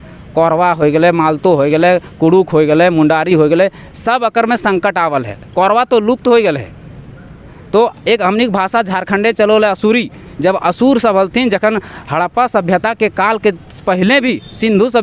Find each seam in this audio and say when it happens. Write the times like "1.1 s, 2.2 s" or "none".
none